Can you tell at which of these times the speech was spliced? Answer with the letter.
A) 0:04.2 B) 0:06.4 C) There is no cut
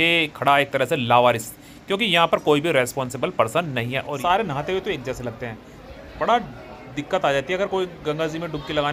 A